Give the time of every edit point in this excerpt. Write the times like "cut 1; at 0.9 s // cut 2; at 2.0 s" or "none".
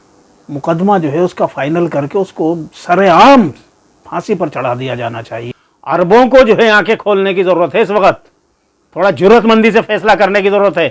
cut 1; at 5.4 s